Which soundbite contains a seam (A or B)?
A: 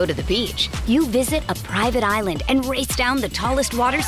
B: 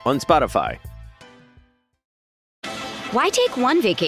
B